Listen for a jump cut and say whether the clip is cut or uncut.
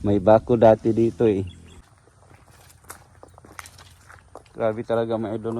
cut